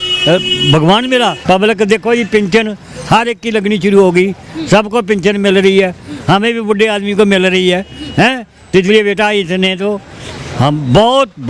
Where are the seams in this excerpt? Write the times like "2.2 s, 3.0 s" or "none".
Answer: 1.4 s